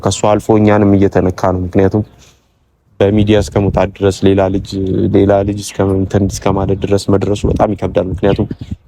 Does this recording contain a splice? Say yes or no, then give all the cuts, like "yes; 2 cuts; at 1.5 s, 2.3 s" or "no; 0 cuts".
no; 0 cuts